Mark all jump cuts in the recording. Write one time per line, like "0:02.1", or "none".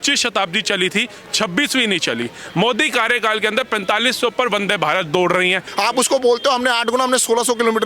0:05.7